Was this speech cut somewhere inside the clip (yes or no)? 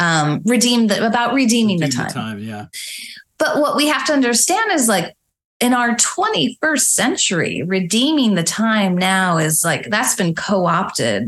no